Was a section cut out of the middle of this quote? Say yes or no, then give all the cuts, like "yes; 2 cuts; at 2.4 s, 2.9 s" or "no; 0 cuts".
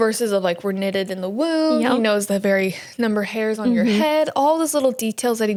no; 0 cuts